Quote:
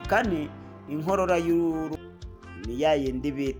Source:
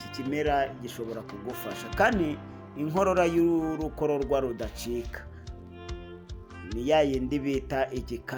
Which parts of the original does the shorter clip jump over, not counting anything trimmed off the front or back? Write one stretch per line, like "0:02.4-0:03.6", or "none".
0:03.9-0:06.1